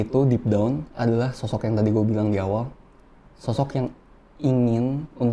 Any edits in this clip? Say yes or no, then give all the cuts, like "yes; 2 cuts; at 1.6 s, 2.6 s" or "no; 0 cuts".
no; 0 cuts